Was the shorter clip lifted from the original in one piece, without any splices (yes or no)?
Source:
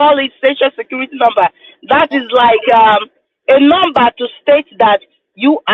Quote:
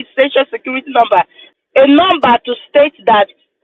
no